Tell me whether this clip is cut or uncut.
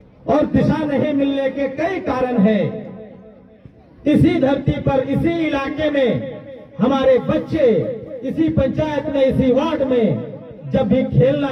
uncut